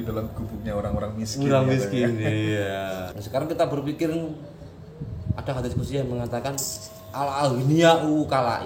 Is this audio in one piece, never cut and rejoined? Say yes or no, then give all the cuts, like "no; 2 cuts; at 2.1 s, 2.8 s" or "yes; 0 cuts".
no; 1 cut; at 3.1 s